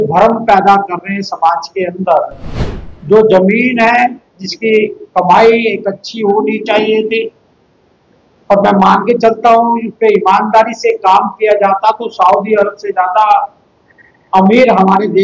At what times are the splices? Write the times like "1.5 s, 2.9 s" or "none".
none